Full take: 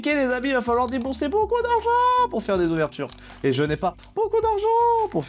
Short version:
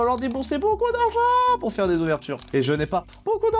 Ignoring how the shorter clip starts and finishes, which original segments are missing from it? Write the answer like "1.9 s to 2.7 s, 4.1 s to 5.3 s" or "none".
3.1 s to 3.3 s